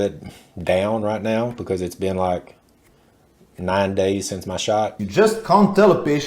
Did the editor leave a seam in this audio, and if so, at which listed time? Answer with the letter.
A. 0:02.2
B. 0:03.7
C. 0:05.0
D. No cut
C